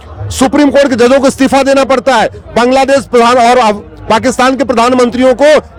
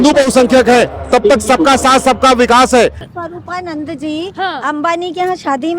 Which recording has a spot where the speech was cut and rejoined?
second; 1 cut; at 3.0 s

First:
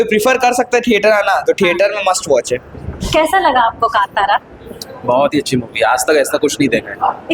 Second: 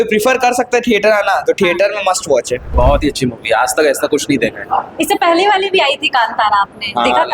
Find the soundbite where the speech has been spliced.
second; 1 cut; at 2.6 s

